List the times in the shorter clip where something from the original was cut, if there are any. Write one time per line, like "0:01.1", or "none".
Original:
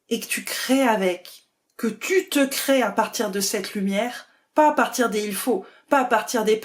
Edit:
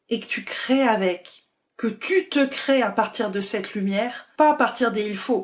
0:04.2